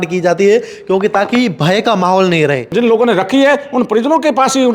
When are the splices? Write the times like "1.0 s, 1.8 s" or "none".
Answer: 2.7 s